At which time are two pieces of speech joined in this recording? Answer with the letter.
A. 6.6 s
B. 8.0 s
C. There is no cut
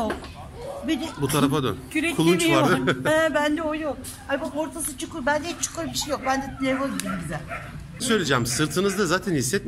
B